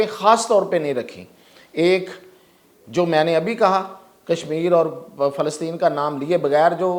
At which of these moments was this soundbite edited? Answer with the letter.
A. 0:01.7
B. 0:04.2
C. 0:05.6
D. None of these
D